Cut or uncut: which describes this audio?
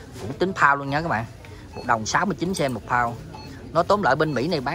uncut